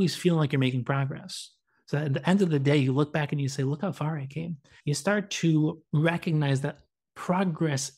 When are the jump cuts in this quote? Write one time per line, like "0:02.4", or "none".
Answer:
0:04.7
0:05.8

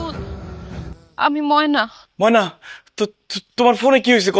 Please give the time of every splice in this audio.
0:01.0
0:02.0

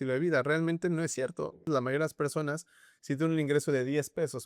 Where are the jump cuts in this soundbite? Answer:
0:01.7

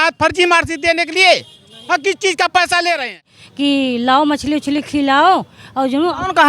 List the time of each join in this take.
0:03.4

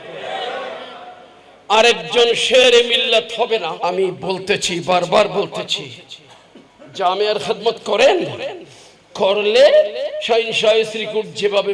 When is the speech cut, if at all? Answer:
0:03.8

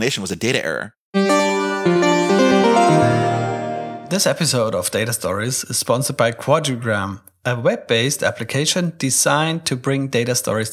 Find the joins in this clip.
0:01.0
0:03.9

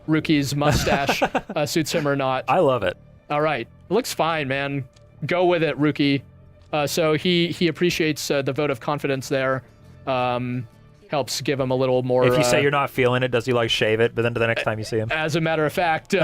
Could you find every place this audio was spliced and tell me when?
0:02.4

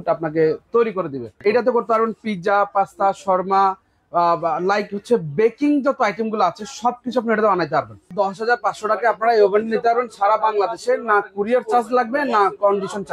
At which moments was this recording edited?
0:01.4
0:08.1

